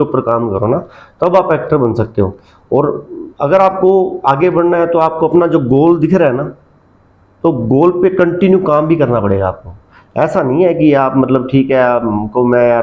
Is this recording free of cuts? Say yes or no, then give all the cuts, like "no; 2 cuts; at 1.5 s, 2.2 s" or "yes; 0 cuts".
yes; 0 cuts